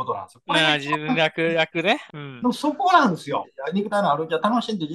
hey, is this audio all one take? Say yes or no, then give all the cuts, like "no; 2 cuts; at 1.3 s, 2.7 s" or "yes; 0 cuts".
no; 2 cuts; at 2.0 s, 3.5 s